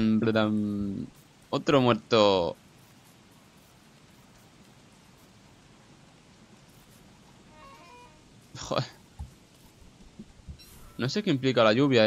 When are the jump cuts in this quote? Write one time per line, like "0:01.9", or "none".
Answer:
none

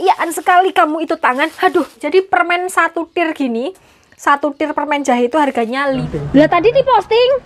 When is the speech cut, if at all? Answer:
0:02.0
0:06.0

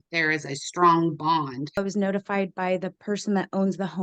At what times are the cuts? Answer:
0:01.8

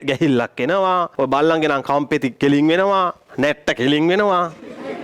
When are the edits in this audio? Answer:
0:01.1
0:03.2

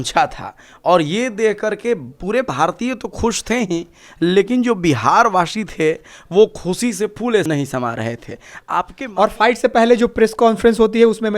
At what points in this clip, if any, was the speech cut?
0:07.5
0:09.0

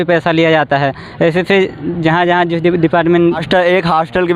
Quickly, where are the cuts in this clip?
0:03.4

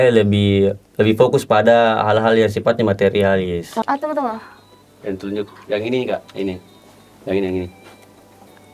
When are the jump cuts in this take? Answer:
0:03.8

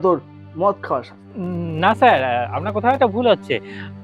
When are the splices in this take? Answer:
0:01.1

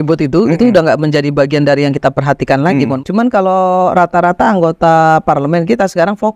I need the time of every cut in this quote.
0:02.9

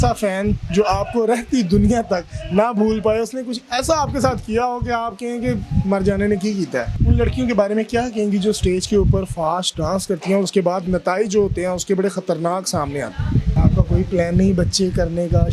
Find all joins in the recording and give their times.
0:06.9
0:13.5

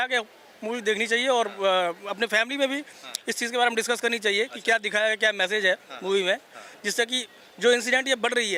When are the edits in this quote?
none

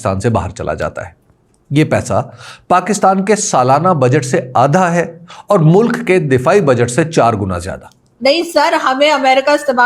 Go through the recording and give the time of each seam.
0:08.1

